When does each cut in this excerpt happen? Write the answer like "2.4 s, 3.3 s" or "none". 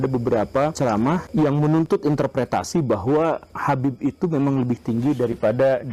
0.9 s